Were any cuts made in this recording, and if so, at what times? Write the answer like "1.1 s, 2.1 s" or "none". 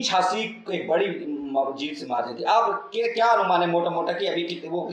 none